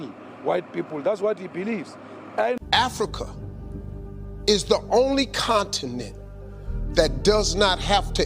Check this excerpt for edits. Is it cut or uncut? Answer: cut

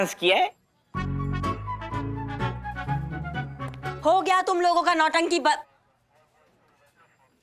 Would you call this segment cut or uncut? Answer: uncut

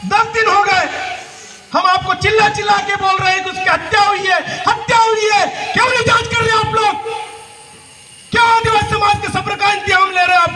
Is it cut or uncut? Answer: uncut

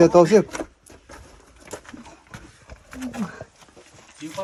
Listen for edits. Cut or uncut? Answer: uncut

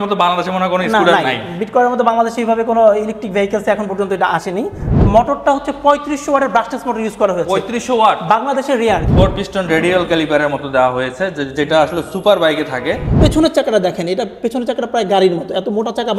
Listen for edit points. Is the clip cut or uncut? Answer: cut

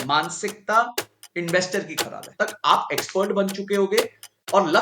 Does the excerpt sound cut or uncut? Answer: cut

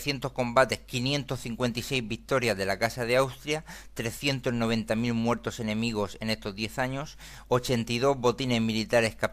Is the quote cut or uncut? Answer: uncut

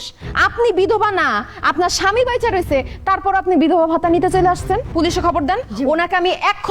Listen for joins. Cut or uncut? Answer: cut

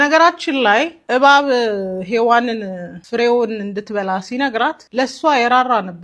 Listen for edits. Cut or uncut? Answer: cut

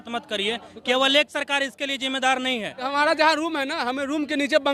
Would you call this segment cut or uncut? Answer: cut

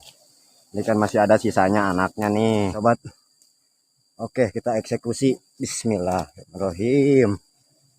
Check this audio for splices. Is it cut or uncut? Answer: cut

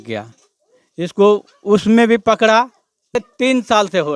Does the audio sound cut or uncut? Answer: cut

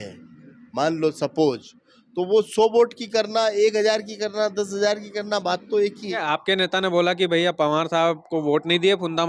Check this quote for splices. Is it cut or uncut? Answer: cut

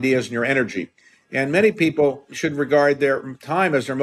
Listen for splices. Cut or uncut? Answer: cut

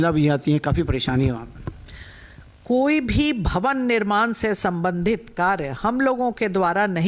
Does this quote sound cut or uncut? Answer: uncut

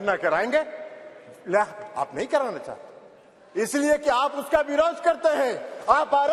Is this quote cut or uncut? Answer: uncut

